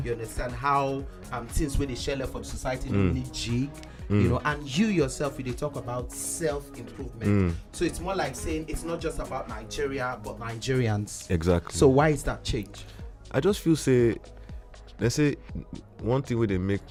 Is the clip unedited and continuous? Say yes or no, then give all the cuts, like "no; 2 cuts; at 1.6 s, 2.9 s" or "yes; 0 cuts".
yes; 0 cuts